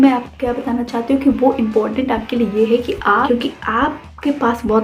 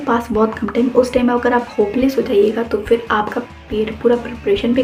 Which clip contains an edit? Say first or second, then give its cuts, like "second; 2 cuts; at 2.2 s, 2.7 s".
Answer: first; 1 cut; at 3.3 s